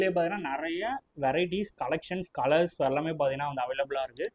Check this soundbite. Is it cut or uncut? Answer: uncut